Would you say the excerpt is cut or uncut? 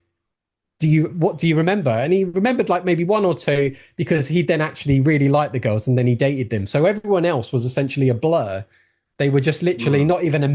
uncut